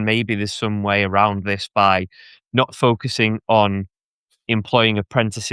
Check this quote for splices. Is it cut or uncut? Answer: uncut